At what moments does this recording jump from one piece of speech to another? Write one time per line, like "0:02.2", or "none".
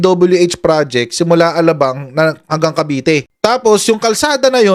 0:03.3